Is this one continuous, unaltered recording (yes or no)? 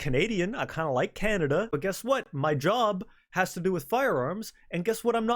no